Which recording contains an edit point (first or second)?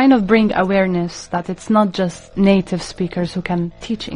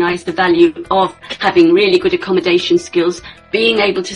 first